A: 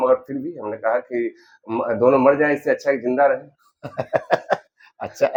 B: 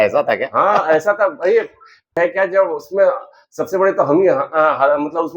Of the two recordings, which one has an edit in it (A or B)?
B